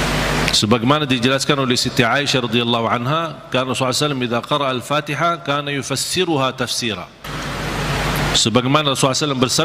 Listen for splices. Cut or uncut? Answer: cut